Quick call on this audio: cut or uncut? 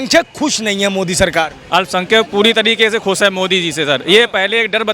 uncut